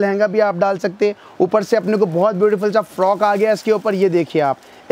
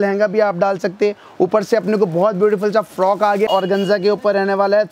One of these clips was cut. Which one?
second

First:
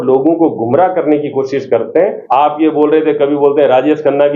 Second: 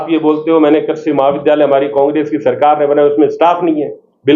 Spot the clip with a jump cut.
first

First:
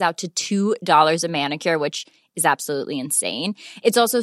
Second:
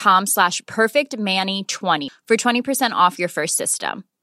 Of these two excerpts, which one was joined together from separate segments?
second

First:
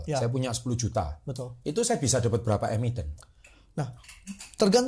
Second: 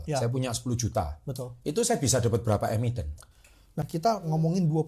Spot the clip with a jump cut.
second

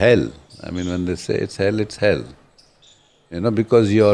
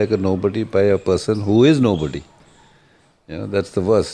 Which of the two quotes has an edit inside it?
second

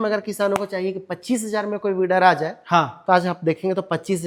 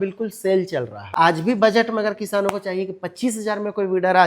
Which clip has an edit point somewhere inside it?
second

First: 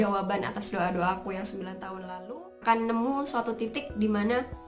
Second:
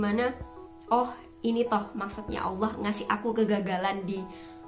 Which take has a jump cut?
first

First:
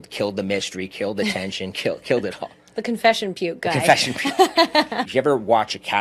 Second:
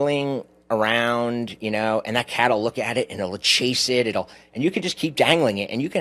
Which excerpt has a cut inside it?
first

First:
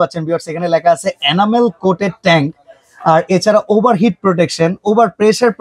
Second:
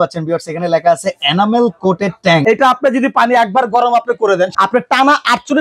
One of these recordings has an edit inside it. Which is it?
second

